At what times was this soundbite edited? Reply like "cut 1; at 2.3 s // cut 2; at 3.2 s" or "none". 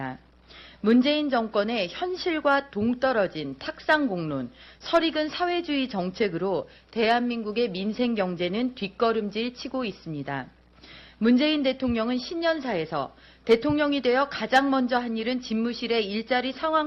cut 1; at 6.8 s